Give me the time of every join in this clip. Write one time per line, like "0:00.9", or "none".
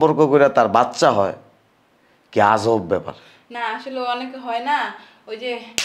none